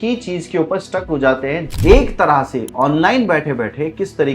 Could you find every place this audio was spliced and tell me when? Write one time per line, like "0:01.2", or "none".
0:01.6

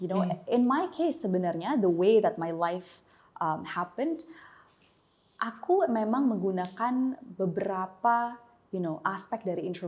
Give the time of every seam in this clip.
none

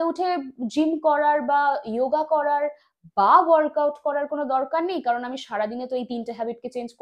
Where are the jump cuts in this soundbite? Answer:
none

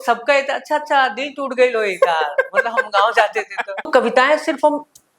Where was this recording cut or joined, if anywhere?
0:03.9

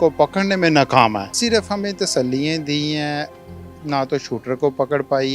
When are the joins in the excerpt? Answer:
0:01.3

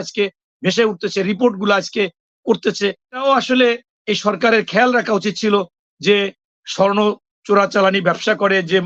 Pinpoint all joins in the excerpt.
0:03.2

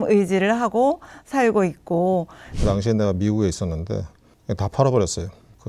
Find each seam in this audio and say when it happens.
0:02.4

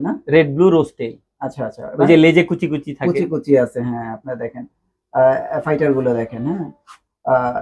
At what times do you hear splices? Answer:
none

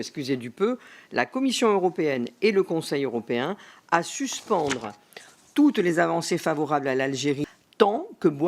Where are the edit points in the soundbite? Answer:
0:07.4

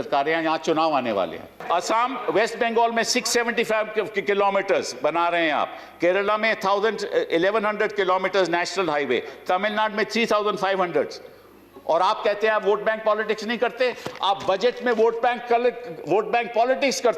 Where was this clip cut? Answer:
0:01.5

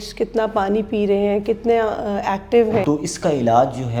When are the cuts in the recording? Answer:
0:02.8

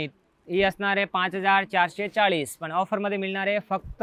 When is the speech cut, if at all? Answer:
none

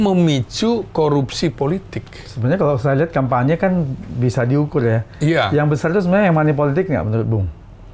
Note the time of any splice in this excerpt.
none

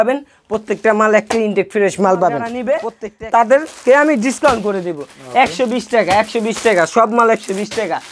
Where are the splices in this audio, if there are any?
0:02.6

